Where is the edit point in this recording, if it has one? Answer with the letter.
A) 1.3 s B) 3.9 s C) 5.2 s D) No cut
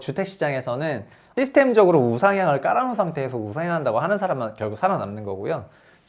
A